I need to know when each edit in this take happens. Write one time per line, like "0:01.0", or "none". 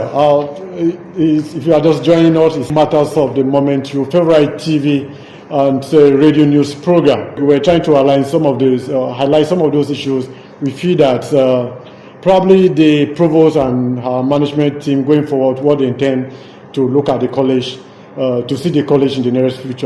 0:02.7
0:07.4